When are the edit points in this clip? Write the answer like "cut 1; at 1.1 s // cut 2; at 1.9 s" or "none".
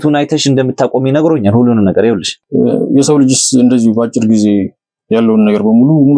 cut 1; at 2.3 s